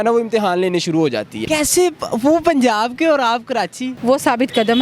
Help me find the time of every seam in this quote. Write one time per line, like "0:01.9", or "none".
0:01.4
0:03.9